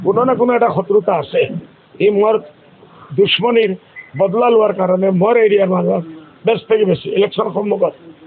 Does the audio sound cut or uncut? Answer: uncut